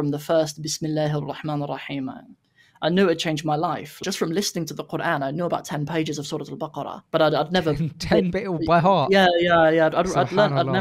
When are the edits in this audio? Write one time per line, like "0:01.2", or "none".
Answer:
0:04.0
0:07.0